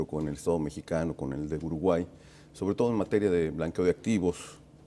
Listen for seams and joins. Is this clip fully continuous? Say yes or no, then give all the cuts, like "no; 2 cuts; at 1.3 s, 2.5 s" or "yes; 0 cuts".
yes; 0 cuts